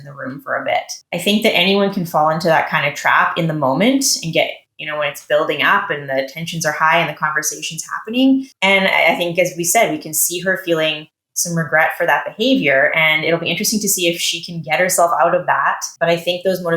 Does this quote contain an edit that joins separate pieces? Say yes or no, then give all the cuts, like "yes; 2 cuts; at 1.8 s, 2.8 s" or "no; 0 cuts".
yes; 1 cut; at 15.9 s